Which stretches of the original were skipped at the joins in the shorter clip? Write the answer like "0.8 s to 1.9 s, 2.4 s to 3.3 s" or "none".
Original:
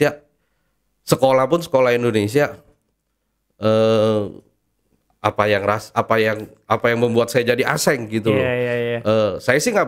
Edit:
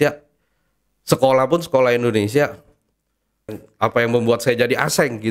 3.5 s to 6.4 s